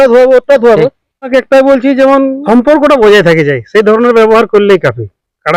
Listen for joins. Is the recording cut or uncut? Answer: cut